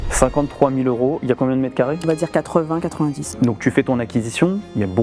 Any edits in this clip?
yes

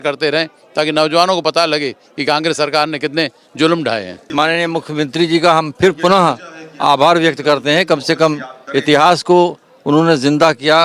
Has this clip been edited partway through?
yes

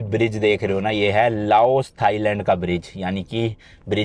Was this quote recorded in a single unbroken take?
yes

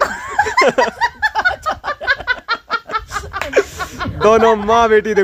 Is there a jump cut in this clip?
no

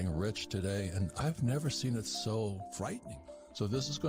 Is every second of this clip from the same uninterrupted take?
no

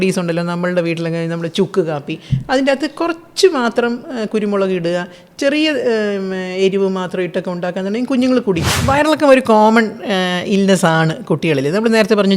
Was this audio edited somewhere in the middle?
yes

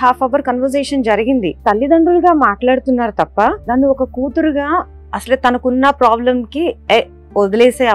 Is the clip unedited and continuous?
no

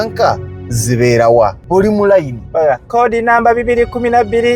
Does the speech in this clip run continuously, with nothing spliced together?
no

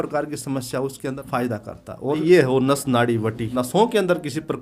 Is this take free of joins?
no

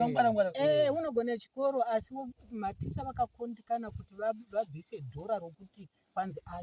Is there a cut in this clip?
no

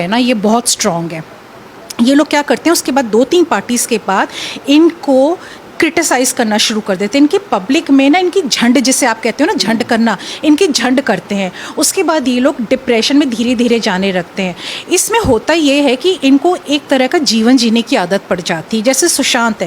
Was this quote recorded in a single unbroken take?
yes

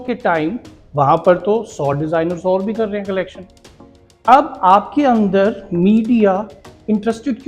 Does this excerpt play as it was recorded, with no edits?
yes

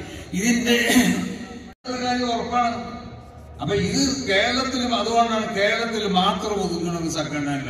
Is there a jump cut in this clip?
yes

